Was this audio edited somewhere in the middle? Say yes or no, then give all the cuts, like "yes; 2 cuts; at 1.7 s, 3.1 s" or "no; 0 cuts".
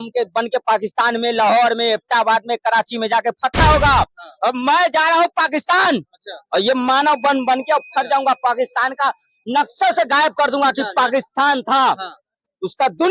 no; 0 cuts